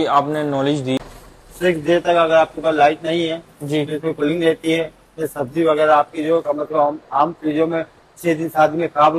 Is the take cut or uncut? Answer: cut